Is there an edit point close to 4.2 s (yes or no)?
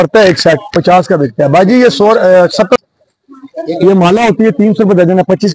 no